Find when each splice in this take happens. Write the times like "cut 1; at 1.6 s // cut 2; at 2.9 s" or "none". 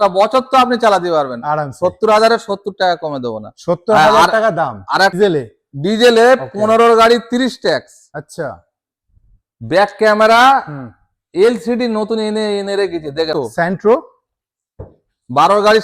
cut 1; at 5.1 s // cut 2; at 13.3 s